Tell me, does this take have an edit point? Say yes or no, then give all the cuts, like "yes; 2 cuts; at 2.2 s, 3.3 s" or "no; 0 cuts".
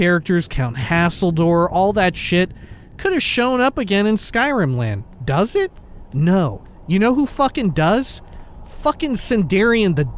no; 0 cuts